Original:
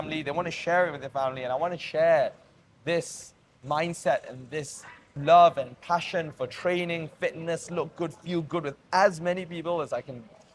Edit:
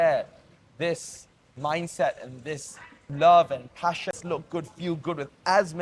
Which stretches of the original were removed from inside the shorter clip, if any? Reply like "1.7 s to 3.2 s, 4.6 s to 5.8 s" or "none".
6.2 s to 7.6 s